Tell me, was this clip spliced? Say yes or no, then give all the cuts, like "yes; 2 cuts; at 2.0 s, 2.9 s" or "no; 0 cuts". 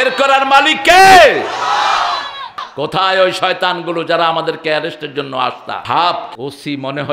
yes; 3 cuts; at 2.6 s, 5.8 s, 6.3 s